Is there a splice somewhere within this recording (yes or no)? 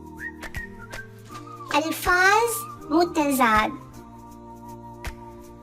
yes